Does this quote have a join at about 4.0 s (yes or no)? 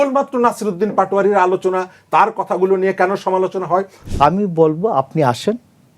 yes